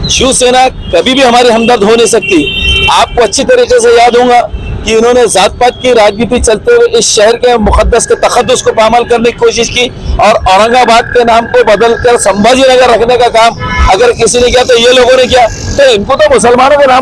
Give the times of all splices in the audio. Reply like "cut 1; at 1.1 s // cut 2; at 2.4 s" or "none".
none